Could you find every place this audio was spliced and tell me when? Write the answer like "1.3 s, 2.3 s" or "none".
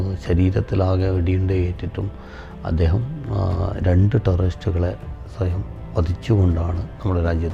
none